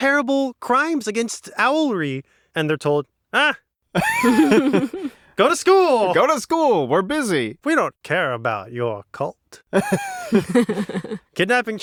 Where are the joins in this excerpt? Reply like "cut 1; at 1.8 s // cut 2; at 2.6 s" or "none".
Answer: none